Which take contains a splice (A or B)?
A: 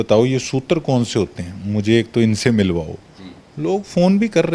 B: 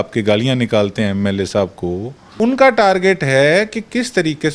B